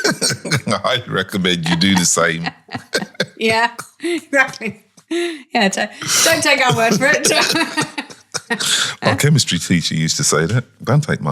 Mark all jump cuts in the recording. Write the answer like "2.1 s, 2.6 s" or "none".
none